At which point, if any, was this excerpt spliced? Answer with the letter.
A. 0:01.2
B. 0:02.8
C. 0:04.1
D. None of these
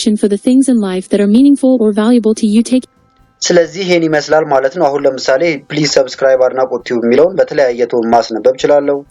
B